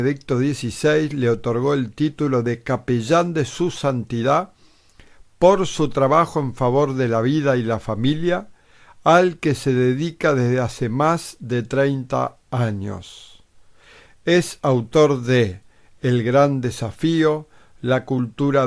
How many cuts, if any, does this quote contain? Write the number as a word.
one